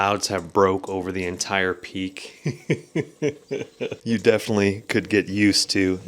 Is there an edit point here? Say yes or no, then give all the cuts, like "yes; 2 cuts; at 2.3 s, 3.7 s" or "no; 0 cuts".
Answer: no; 0 cuts